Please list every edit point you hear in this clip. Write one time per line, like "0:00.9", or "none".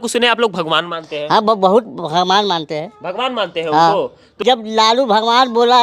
0:04.3